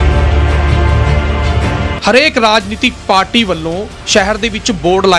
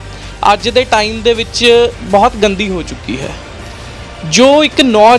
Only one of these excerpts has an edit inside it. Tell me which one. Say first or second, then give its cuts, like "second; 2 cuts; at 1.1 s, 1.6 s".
first; 1 cut; at 2.0 s